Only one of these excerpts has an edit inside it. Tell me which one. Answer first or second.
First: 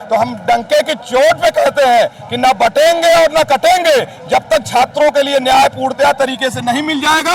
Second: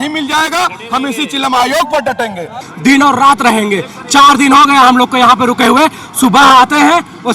second